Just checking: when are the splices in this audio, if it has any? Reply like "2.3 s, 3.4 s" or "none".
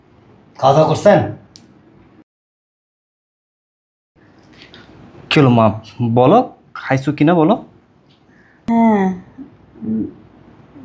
none